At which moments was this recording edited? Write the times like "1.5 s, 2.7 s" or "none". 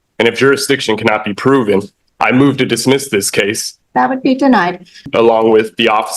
3.7 s, 5.1 s